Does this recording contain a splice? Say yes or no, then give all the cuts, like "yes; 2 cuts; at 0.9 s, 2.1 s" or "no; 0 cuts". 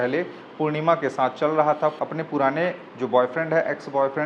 yes; 1 cut; at 2.0 s